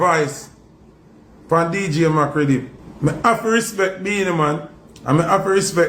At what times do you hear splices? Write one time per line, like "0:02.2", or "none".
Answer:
none